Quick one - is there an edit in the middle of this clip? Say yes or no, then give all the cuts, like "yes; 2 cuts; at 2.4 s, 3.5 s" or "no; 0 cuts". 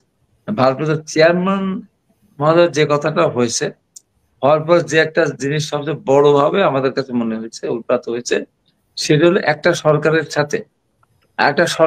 no; 0 cuts